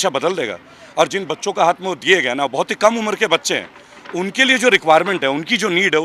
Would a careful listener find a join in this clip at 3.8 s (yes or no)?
no